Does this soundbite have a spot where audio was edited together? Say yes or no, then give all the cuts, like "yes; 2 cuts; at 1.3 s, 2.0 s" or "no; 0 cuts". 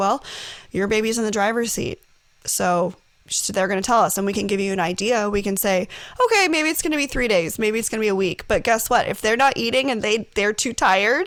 no; 0 cuts